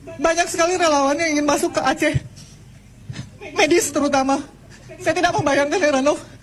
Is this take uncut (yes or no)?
yes